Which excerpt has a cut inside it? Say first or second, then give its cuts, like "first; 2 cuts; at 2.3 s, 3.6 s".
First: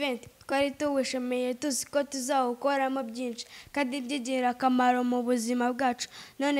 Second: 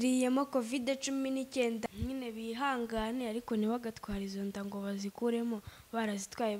second; 1 cut; at 1.8 s